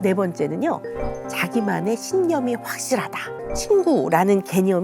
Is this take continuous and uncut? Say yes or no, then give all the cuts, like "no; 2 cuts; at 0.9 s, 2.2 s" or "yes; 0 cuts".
no; 1 cut; at 3.3 s